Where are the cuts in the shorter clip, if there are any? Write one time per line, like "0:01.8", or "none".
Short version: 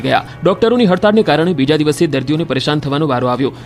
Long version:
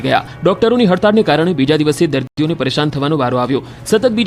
0:02.2